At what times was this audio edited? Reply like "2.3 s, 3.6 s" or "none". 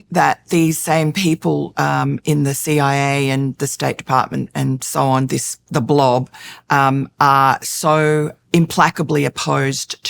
8.4 s